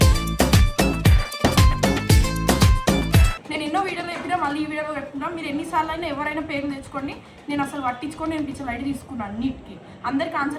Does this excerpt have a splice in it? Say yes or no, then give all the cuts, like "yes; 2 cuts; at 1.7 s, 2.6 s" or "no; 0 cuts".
yes; 1 cut; at 3.4 s